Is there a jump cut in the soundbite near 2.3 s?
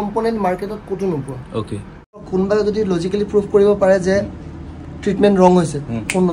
yes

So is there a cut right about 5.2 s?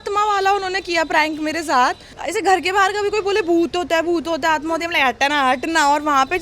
no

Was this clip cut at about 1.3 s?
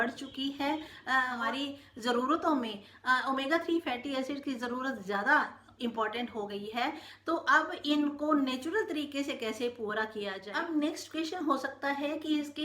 yes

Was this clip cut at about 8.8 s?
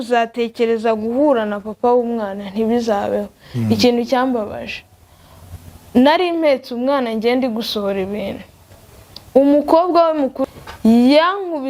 no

